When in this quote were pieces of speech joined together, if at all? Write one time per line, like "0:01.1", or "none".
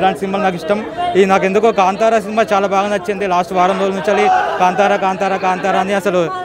none

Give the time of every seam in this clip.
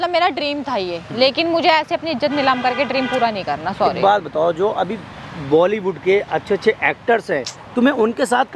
none

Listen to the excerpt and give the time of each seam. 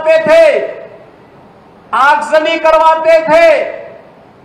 none

